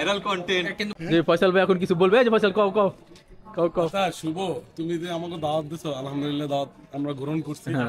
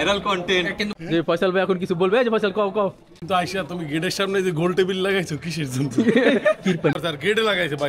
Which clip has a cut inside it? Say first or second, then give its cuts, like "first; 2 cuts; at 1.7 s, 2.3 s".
second; 2 cuts; at 3.1 s, 6.9 s